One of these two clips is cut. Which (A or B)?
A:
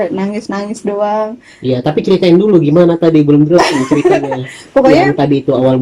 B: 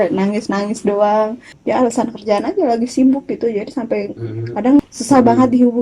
B